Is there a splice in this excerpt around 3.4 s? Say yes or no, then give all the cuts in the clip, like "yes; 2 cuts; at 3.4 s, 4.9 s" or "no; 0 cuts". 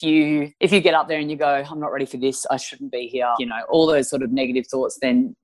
yes; 1 cut; at 3.4 s